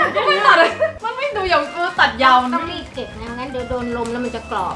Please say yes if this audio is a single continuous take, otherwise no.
yes